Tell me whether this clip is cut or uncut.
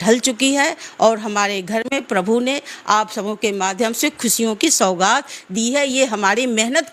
uncut